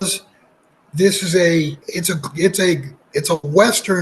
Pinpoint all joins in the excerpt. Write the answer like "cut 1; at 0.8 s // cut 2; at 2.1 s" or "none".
cut 1; at 1.9 s // cut 2; at 2.9 s